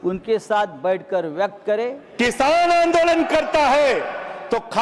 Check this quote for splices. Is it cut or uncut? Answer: cut